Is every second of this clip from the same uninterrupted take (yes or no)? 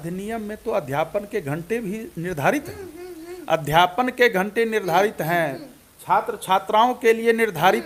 yes